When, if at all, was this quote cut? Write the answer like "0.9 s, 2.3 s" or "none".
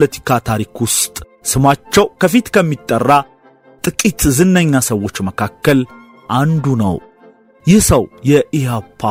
none